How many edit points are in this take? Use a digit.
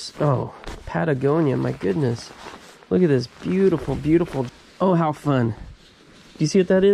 1